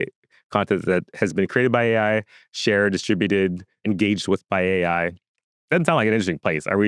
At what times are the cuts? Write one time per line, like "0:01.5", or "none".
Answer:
none